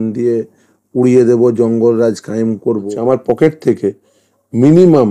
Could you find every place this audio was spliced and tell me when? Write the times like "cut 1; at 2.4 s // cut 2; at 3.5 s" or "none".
cut 1; at 2.9 s